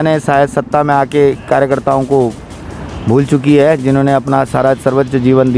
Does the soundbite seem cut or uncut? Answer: uncut